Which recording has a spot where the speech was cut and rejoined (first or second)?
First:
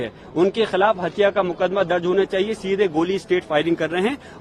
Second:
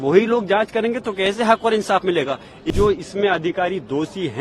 second